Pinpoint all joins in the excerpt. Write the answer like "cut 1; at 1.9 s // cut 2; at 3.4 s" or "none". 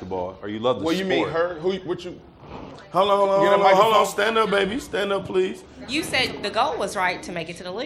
cut 1; at 5.7 s